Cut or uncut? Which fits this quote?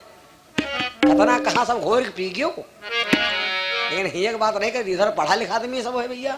uncut